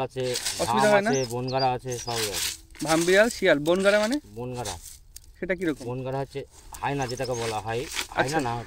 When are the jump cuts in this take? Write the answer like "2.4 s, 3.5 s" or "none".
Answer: none

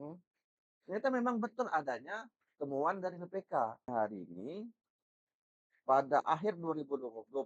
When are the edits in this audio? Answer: 3.9 s

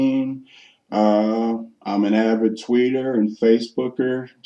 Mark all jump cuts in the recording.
1.7 s

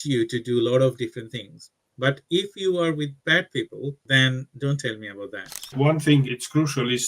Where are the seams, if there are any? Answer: 4.0 s, 5.7 s

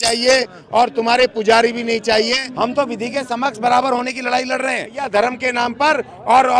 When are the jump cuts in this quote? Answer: 2.4 s, 5.0 s

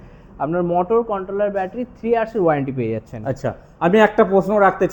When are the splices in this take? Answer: none

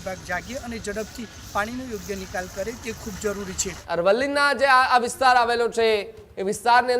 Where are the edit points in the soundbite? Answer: 3.8 s

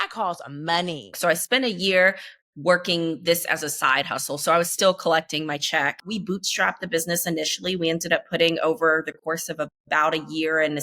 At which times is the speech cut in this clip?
1.2 s, 6.1 s

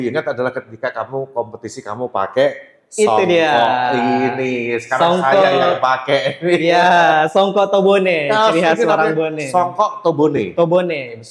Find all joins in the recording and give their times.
none

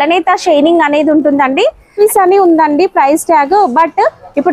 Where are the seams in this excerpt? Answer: 1.9 s

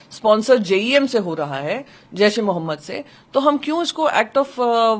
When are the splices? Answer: none

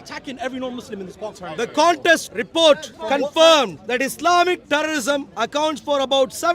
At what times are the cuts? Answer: 1.2 s, 2.3 s, 2.9 s, 3.8 s

